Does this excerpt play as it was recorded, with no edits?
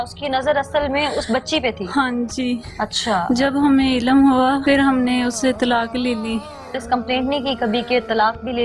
no; 2 cuts; at 4.6 s, 6.8 s

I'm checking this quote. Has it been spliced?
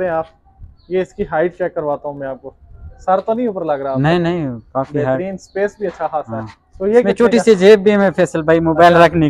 no; 0 cuts

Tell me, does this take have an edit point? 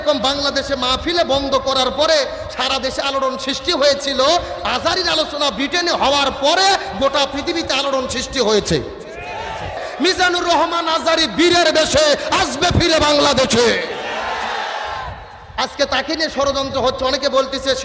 yes; 1 cut; at 9.8 s

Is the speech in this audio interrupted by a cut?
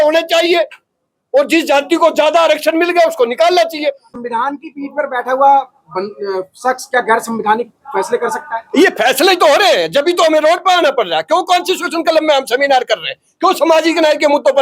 yes; 1 cut; at 4.1 s

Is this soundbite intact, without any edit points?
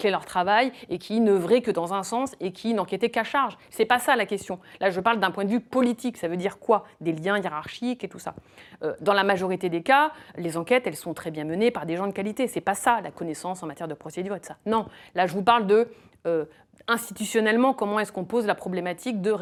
yes; 0 cuts

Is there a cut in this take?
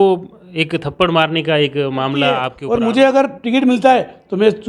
yes; 1 cut; at 2.5 s

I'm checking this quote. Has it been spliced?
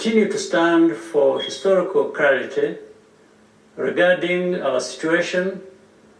no; 0 cuts

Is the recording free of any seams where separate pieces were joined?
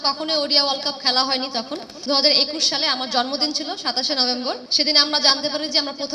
no; 2 cuts; at 1.9 s, 4.7 s

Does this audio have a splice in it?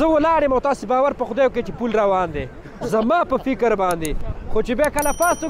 no; 0 cuts

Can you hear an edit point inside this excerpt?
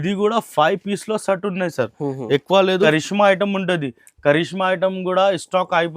yes; 1 cut; at 2.7 s

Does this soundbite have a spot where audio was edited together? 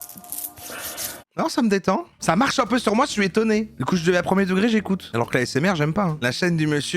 yes; 5 cuts; at 1.3 s, 2.1 s, 3.8 s, 5.1 s, 6.2 s

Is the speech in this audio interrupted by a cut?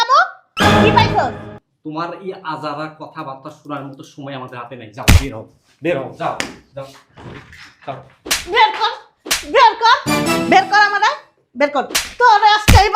yes; 1 cut; at 1.5 s

